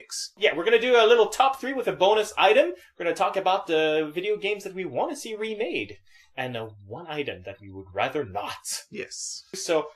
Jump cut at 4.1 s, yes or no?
no